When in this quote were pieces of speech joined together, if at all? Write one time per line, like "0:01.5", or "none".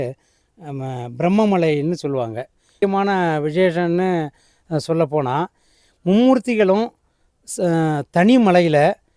0:02.7